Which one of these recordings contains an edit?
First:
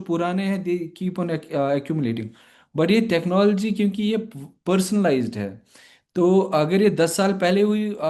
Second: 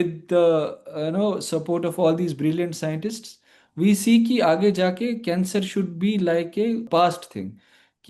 second; 1 cut; at 6.8 s

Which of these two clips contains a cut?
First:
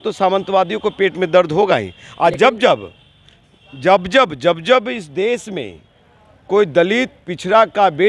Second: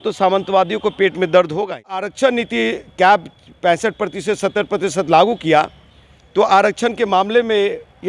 second; 1 cut; at 2.1 s

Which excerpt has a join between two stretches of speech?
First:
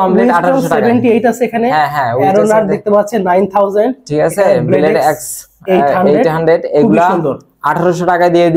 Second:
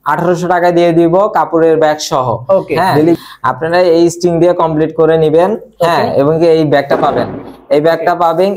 second; 1 cut; at 3.2 s

